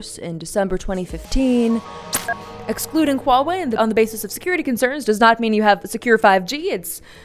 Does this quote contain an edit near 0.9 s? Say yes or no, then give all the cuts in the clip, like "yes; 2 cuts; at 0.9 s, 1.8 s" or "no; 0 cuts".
no; 2 cuts; at 2.2 s, 3.7 s